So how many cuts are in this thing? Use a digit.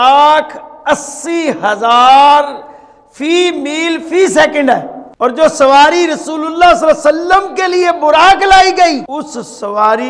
2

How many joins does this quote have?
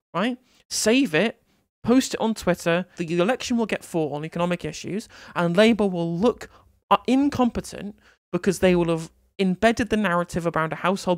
1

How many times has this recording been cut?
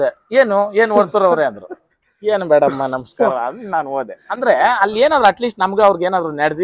0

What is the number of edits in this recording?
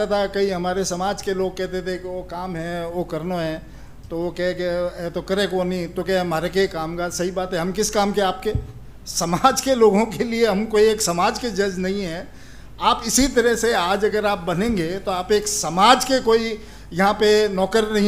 0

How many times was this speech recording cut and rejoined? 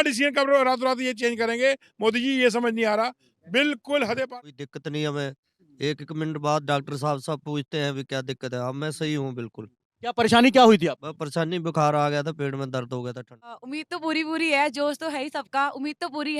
2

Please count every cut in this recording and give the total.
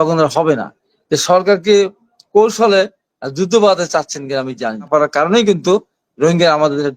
1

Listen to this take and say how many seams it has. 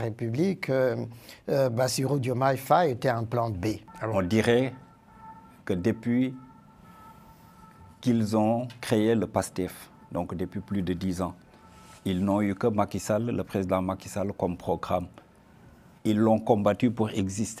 1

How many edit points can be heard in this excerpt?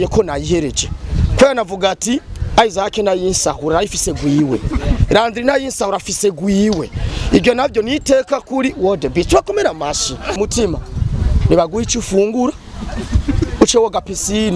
1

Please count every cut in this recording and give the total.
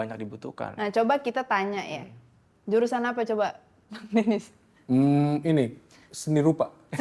0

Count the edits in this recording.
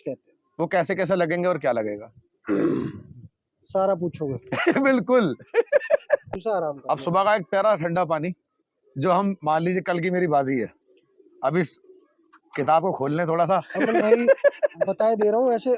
1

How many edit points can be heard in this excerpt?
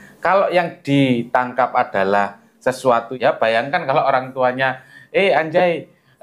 1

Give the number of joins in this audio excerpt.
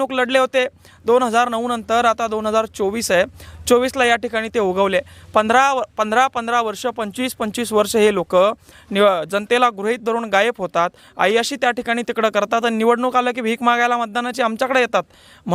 0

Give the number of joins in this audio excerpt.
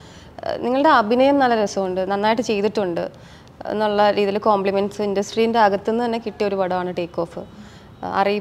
0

